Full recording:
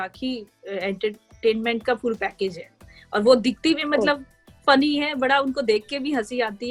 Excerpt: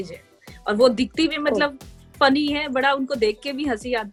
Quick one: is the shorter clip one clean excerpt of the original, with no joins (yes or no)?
yes